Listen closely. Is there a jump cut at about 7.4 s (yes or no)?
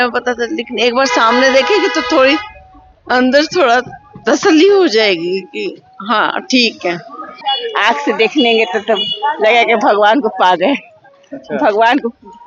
yes